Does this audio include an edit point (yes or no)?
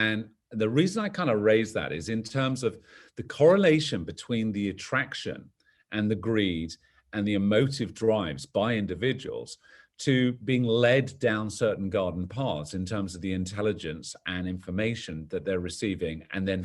no